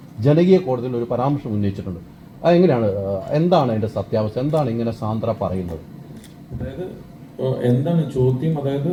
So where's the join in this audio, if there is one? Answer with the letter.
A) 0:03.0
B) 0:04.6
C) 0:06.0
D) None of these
D